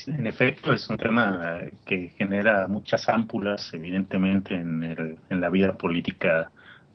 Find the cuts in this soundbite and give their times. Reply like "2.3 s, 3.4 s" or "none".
4.1 s